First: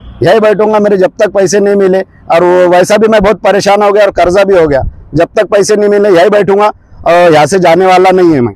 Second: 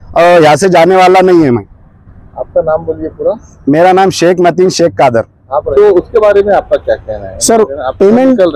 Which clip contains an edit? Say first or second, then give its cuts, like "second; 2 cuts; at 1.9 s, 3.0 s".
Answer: second; 1 cut; at 5.7 s